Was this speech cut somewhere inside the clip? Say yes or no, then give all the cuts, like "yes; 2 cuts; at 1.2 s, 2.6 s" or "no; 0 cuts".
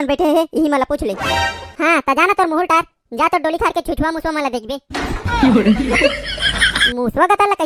no; 0 cuts